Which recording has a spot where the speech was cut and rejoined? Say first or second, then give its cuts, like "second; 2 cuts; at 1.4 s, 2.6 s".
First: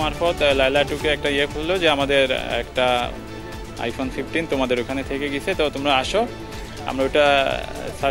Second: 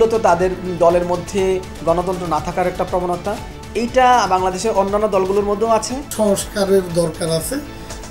second; 1 cut; at 6.0 s